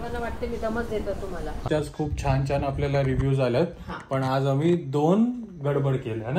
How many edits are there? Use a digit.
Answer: 1